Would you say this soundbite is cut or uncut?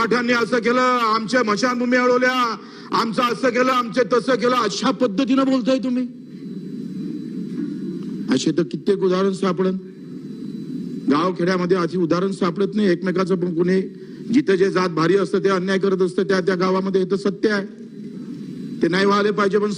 uncut